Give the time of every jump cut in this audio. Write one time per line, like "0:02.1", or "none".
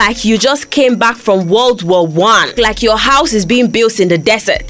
0:02.5